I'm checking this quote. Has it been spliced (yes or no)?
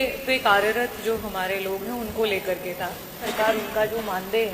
yes